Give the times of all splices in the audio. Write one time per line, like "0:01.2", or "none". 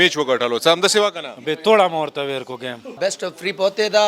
0:01.4
0:02.9